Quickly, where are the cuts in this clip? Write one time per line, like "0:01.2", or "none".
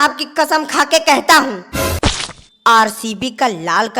0:01.9